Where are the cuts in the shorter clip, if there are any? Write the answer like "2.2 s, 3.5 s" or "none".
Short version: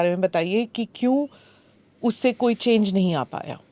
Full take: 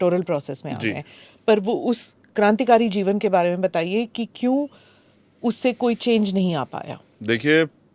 none